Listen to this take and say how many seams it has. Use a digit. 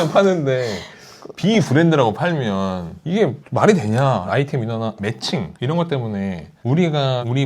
3